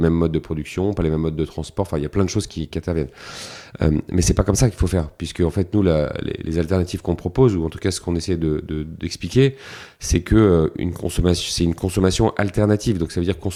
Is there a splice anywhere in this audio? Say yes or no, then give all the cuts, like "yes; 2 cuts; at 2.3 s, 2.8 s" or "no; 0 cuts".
no; 0 cuts